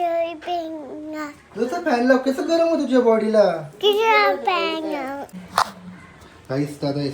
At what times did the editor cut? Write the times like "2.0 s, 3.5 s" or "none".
5.2 s